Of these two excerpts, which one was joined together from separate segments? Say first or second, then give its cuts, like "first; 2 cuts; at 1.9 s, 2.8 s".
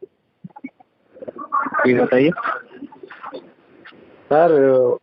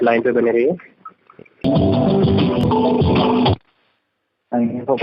second; 2 cuts; at 1.6 s, 2.6 s